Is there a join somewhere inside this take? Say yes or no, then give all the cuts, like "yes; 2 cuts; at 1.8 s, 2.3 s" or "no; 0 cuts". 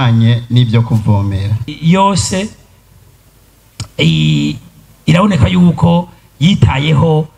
yes; 1 cut; at 1.7 s